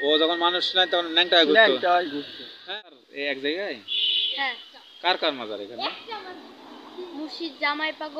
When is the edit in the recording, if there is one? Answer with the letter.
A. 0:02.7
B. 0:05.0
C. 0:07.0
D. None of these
A